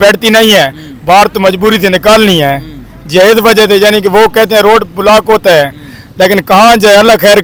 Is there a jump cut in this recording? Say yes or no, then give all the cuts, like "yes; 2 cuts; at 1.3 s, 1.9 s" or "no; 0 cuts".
no; 0 cuts